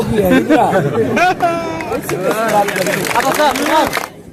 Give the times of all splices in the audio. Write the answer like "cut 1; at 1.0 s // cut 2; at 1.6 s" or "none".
none